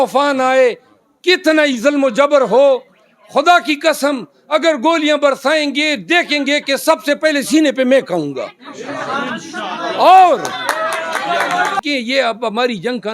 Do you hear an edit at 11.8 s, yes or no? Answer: yes